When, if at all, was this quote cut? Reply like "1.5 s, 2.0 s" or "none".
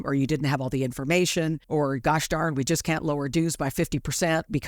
1.6 s